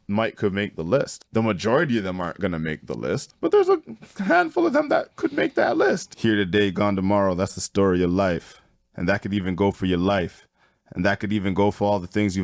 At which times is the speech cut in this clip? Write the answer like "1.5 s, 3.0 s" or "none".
1.2 s, 3.3 s, 6.1 s